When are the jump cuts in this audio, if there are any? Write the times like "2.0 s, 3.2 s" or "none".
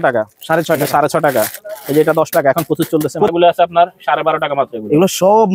3.3 s

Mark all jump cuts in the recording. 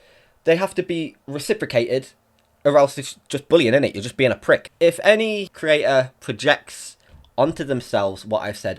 1.2 s, 4.7 s, 5.5 s

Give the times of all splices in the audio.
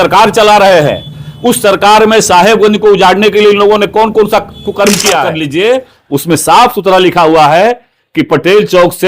5.4 s

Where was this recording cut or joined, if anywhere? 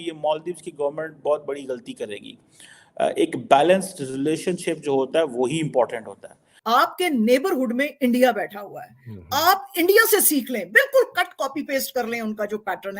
6.5 s

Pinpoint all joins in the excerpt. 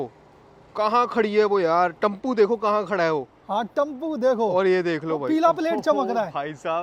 none

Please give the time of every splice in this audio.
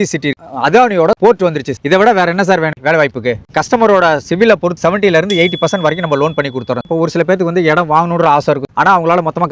3.4 s, 4.8 s, 6.8 s

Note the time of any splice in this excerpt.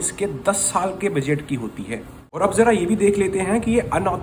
none

